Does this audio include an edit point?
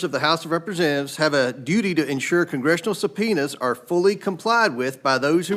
no; 0 cuts

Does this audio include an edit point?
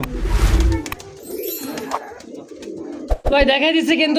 yes; 1 cut; at 3.2 s

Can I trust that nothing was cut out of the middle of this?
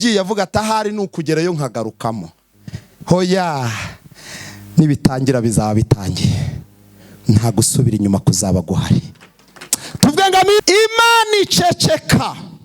no; 1 cut; at 10.6 s

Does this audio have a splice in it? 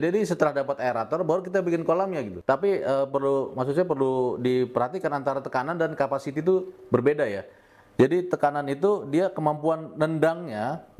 yes; 1 cut; at 2.3 s

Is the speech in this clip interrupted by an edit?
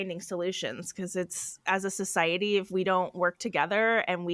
no; 0 cuts

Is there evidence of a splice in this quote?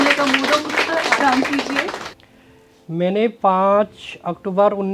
yes; 1 cut; at 2.1 s

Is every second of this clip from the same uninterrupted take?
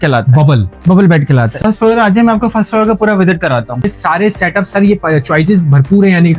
no; 2 cuts; at 1.6 s, 3.8 s

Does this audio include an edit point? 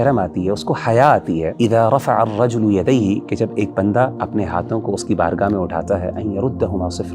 yes; 2 cuts; at 1.5 s, 4.2 s

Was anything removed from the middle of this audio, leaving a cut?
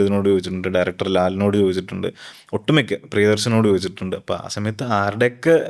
no; 0 cuts

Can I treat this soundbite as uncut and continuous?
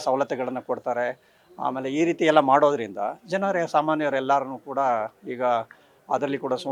yes; 0 cuts

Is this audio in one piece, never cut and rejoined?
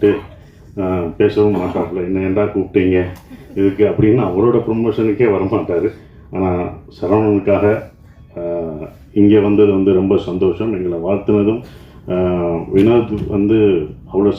yes; 0 cuts

